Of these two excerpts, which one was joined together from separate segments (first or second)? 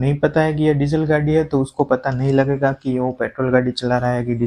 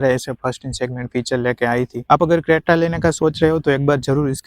second